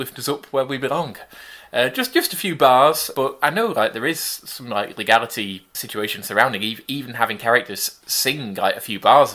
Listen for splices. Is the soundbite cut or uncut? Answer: cut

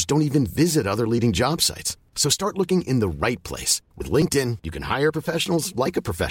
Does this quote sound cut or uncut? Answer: uncut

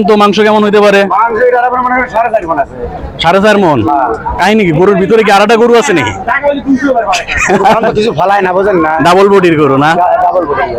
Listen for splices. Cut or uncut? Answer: uncut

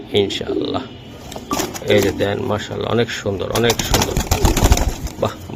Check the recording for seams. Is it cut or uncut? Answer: uncut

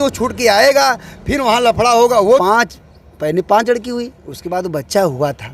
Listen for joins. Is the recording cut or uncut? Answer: cut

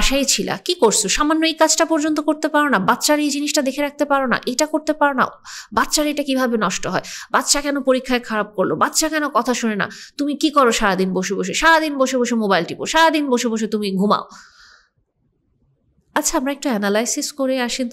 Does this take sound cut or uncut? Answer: uncut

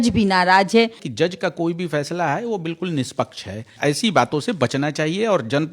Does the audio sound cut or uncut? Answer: cut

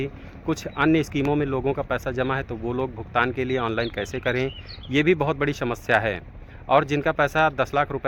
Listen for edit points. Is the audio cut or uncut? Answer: uncut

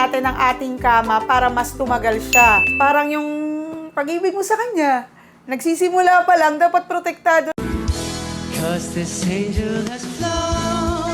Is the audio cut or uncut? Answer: uncut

